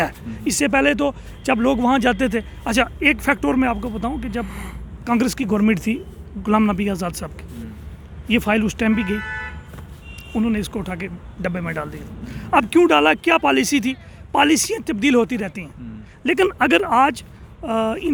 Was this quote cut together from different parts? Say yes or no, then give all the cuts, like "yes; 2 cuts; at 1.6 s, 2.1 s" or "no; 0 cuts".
no; 0 cuts